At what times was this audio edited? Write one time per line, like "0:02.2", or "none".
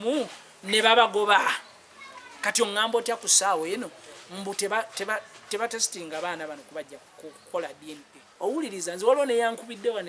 0:08.2